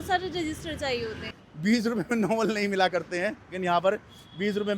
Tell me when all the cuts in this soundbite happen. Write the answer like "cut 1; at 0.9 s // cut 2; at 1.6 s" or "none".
cut 1; at 1.2 s